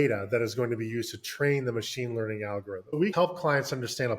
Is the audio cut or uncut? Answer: cut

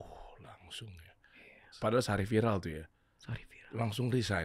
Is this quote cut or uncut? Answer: cut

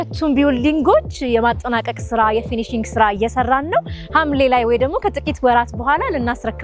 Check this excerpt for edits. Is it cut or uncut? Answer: uncut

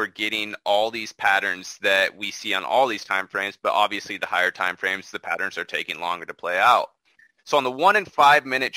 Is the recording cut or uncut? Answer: uncut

